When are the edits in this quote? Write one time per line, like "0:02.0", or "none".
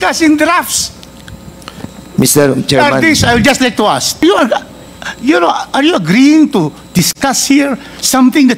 0:04.2

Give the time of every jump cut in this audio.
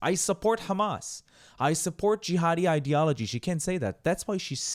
none

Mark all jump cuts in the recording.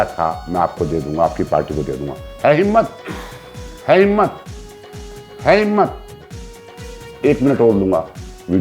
none

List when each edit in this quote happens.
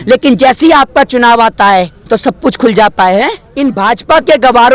0:02.0
0:03.4

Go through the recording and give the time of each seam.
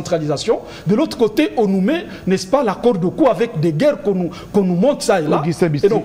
none

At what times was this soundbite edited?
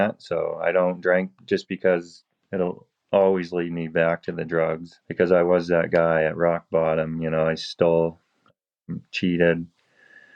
0:05.0

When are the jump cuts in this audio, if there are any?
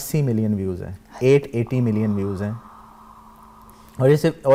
none

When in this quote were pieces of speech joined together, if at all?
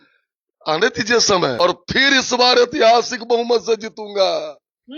0:01.6

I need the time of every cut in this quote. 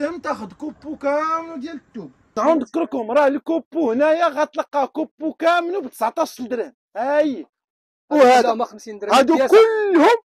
0:02.4
0:07.6

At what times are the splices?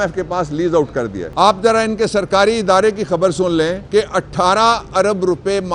0:01.2
0:03.8

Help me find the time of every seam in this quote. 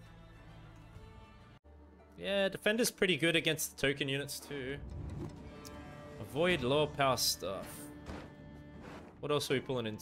0:01.6

